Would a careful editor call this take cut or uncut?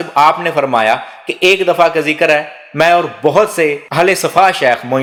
uncut